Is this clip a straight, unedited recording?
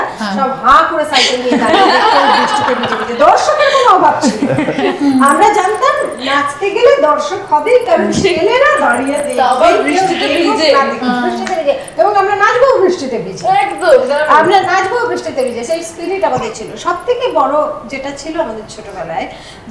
yes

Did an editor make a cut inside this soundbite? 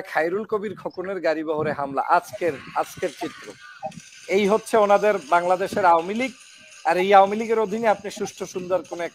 no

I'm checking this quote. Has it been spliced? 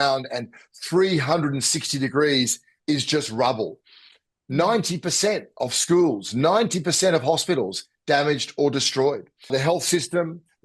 no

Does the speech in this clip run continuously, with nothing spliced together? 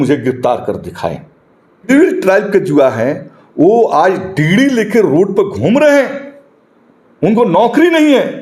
no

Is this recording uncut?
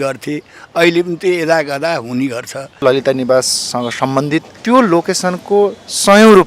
no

